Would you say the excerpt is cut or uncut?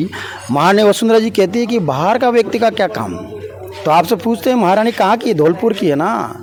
uncut